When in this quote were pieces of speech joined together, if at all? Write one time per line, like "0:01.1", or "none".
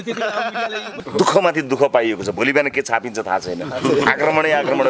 0:00.9